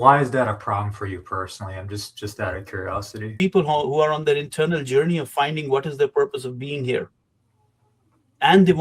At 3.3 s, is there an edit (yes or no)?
yes